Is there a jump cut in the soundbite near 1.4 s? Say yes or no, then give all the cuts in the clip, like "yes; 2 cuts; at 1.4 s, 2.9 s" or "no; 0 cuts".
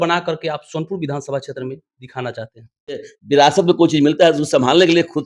no; 1 cut; at 3.1 s